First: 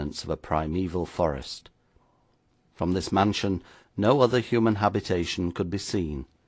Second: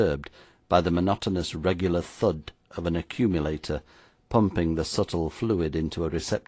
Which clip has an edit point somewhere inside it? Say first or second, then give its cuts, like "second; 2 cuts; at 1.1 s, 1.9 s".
first; 1 cut; at 5.5 s